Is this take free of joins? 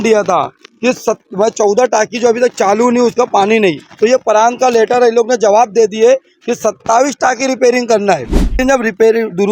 no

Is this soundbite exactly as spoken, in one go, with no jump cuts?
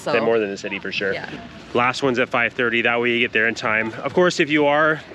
no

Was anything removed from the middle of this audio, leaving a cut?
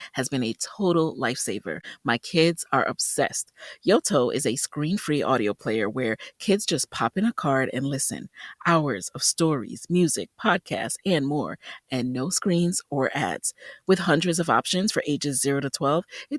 no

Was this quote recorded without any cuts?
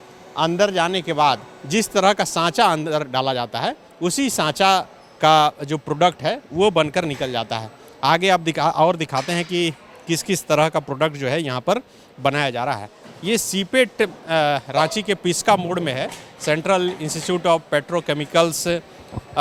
yes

